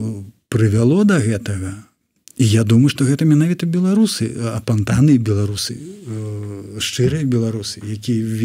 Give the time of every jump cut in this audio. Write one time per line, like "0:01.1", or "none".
none